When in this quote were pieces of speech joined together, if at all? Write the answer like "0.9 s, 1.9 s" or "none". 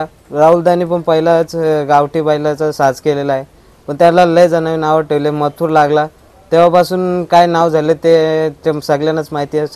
none